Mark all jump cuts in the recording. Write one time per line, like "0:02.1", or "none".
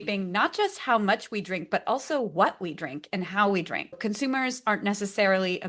0:04.0